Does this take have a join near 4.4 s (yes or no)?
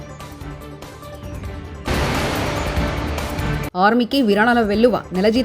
no